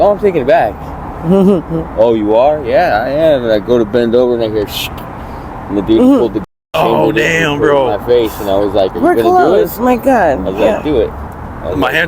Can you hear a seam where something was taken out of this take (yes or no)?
no